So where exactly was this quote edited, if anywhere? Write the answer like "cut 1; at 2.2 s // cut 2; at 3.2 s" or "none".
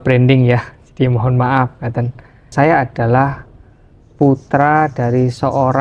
cut 1; at 2.5 s